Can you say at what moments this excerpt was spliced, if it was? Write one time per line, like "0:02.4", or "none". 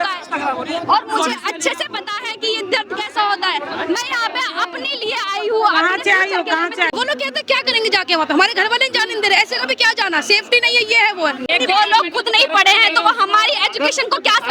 0:06.9
0:11.4